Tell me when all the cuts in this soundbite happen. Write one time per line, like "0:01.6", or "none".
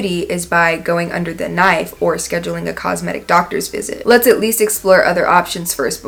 none